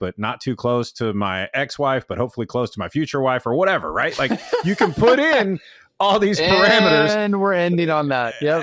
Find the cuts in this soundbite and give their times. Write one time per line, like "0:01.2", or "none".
none